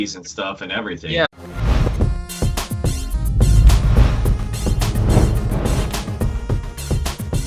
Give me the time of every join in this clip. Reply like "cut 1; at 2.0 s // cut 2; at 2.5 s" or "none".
none